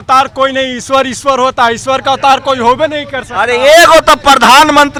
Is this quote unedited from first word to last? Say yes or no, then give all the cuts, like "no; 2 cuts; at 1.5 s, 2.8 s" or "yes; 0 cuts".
yes; 0 cuts